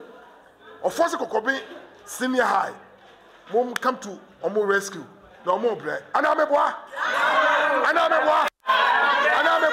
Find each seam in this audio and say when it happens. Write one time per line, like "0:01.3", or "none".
none